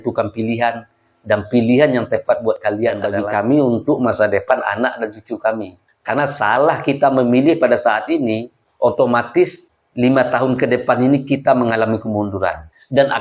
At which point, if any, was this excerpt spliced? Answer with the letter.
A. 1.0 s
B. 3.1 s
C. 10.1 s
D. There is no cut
B